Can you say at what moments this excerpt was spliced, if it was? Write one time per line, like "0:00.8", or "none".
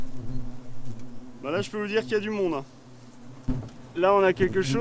0:03.4